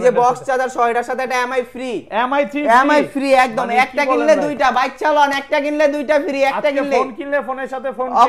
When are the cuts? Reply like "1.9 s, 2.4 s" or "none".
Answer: none